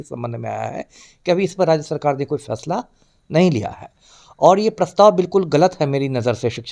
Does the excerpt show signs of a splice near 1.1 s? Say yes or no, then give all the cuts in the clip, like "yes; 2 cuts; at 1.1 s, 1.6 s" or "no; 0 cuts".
no; 0 cuts